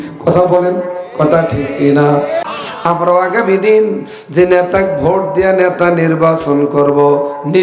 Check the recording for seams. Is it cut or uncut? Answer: cut